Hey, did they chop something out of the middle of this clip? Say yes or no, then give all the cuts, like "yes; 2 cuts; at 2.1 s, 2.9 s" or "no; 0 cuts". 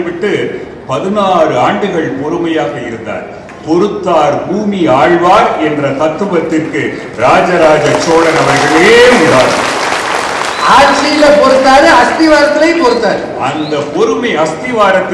no; 0 cuts